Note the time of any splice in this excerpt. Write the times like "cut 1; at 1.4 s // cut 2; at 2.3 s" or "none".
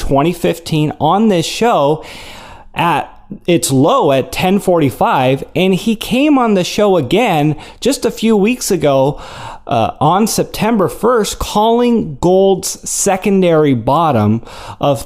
cut 1; at 5.3 s